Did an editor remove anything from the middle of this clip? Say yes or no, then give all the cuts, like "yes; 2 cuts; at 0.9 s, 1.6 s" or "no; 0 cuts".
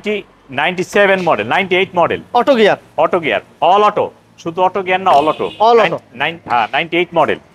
no; 0 cuts